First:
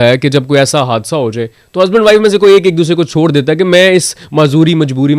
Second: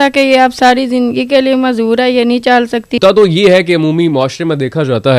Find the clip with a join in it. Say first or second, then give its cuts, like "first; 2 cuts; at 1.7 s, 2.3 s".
second; 1 cut; at 3.0 s